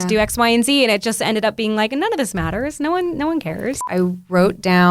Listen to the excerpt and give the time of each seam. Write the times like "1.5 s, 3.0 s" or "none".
3.8 s